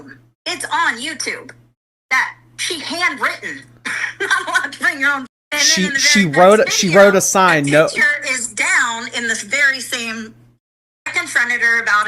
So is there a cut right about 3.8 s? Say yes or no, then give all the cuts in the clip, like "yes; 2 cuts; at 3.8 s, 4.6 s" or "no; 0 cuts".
no; 2 cuts; at 5.3 s, 11.1 s